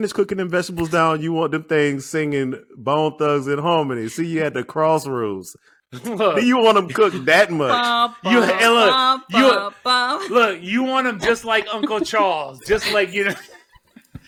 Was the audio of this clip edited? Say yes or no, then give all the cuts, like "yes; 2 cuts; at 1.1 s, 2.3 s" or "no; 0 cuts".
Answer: no; 0 cuts